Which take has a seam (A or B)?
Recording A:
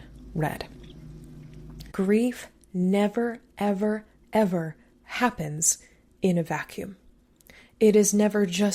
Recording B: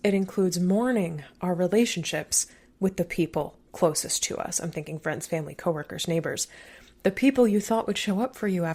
A